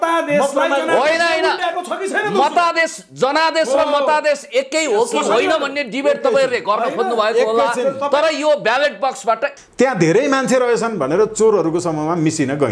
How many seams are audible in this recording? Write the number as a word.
one